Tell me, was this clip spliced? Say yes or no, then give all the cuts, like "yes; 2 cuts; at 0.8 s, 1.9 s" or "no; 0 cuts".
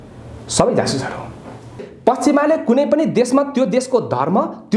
yes; 1 cut; at 1.8 s